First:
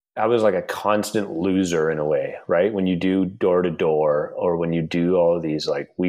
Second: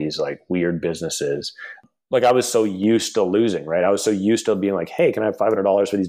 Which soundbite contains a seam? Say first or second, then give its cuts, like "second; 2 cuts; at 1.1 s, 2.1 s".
second; 1 cut; at 1.8 s